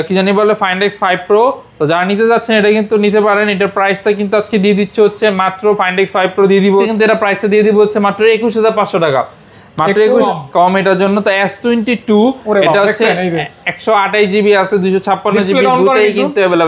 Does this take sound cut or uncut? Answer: cut